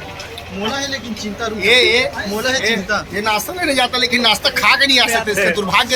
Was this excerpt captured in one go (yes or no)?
yes